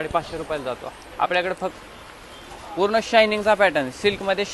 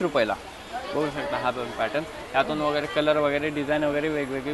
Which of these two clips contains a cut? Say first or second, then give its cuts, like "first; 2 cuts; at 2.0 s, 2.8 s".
first; 1 cut; at 1.7 s